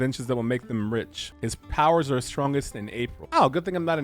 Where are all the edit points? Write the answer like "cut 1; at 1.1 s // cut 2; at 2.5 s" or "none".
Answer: cut 1; at 1.2 s // cut 2; at 3.2 s